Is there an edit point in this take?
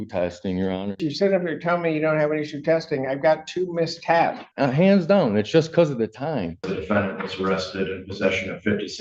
yes; 3 cuts; at 1.1 s, 4.5 s, 6.7 s

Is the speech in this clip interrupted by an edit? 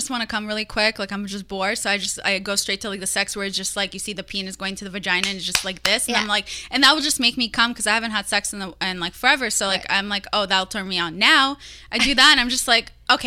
no; 0 cuts

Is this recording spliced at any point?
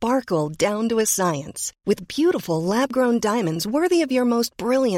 no; 0 cuts

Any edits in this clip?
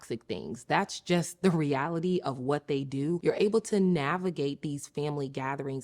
yes; 1 cut; at 3.2 s

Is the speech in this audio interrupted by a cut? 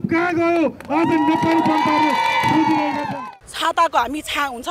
yes; 1 cut; at 3.1 s

